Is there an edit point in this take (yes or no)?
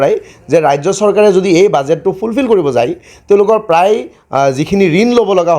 no